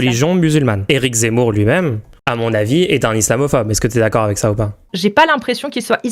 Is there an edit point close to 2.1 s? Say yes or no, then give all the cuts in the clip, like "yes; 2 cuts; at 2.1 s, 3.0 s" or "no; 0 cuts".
yes; 3 cuts; at 0.8 s, 2.1 s, 4.9 s